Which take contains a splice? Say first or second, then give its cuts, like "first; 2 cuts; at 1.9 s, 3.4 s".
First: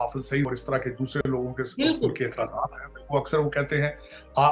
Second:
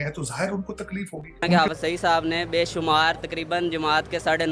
second; 1 cut; at 1.5 s